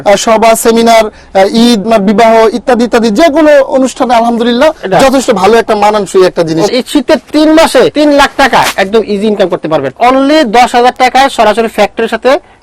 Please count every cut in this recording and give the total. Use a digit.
4